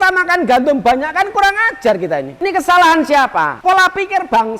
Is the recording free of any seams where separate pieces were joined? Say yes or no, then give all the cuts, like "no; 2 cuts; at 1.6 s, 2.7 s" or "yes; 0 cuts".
no; 2 cuts; at 2.3 s, 3.5 s